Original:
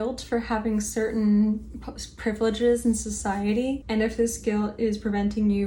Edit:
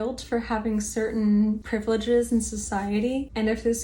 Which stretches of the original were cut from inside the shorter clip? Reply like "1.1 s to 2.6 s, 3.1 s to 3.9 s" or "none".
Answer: 1.6 s to 2.2 s